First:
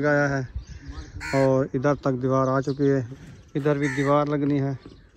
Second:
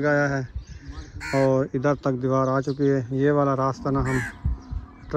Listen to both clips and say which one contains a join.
first; 1 cut; at 3.1 s

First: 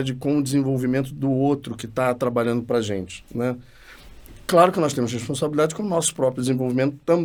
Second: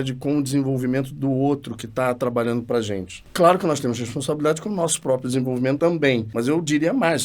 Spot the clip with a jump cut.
second; 2 cuts; at 3.2 s, 5.9 s

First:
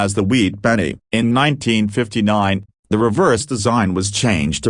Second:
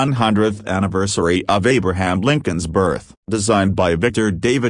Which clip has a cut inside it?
second; 1 cut; at 3.4 s

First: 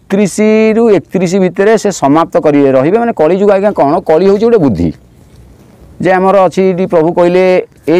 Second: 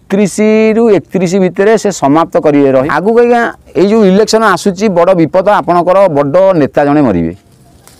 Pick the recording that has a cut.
second; 1 cut; at 2.9 s

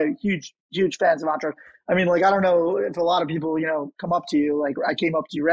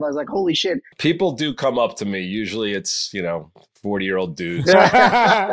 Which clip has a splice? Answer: second; 2 cuts; at 0.9 s, 4.6 s

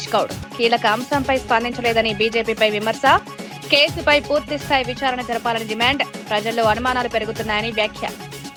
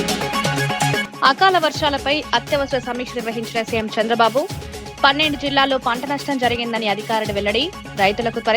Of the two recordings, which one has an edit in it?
second; 1 cut; at 1.0 s

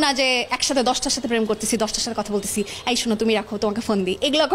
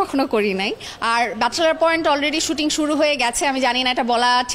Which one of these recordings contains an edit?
second; 1 cut; at 0.9 s

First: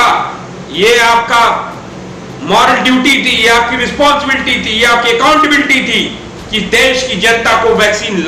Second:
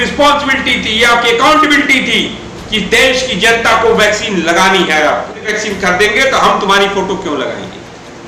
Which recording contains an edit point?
second; 1 cut; at 5.5 s

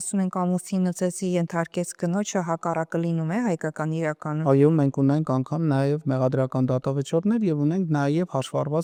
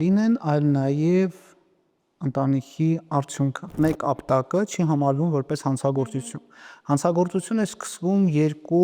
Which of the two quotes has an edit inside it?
second; 1 cut; at 3.7 s

